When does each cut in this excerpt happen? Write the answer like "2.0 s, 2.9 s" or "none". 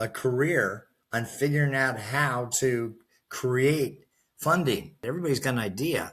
5.0 s